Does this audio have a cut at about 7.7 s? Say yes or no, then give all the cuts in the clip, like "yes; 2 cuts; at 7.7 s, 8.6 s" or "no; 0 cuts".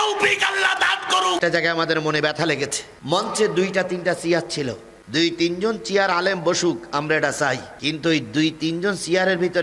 yes; 2 cuts; at 1.4 s, 7.7 s